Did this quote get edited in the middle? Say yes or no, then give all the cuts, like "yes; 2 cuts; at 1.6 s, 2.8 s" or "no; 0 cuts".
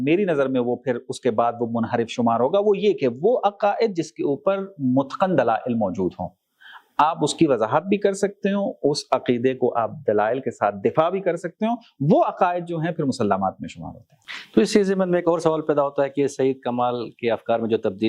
no; 0 cuts